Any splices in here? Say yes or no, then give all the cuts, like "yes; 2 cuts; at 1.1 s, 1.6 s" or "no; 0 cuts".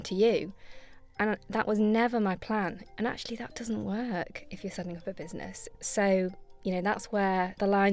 yes; 2 cuts; at 2.8 s, 5.6 s